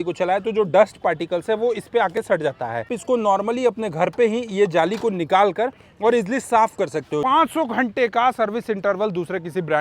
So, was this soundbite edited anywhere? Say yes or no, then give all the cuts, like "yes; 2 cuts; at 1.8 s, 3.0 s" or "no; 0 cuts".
yes; 2 cuts; at 3.0 s, 7.2 s